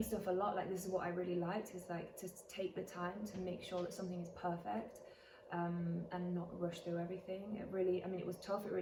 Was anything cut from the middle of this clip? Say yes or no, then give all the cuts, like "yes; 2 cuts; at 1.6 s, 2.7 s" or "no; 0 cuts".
no; 0 cuts